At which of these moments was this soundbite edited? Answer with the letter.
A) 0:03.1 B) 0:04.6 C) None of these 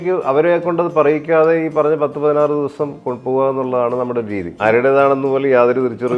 B